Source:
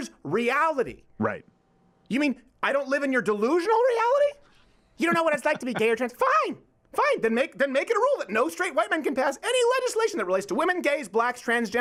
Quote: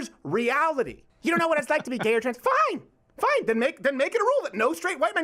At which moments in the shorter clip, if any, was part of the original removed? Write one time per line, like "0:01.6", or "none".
0:01.0